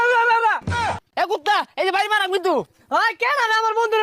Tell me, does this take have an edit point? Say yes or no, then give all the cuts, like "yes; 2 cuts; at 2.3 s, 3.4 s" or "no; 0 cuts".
yes; 1 cut; at 1.1 s